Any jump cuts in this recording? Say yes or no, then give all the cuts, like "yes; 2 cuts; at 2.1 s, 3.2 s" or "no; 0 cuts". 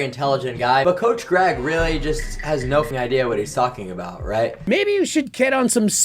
yes; 2 cuts; at 2.9 s, 4.6 s